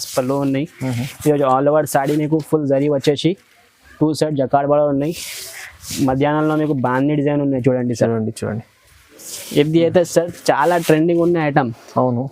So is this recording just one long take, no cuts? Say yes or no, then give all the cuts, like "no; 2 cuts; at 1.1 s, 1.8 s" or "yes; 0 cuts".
yes; 0 cuts